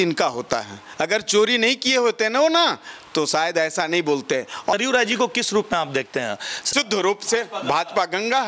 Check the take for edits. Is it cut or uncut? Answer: cut